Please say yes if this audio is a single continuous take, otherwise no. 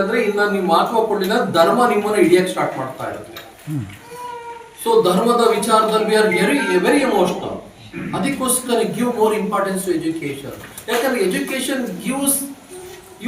yes